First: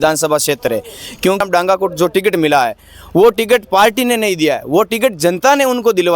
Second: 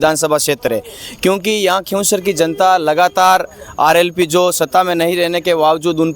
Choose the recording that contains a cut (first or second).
first